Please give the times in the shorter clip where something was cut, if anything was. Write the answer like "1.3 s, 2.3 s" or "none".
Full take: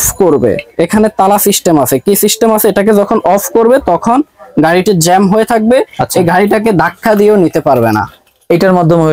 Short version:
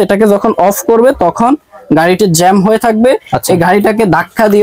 none